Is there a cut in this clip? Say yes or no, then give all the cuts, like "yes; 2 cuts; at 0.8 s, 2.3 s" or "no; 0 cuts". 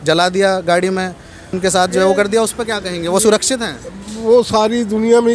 no; 0 cuts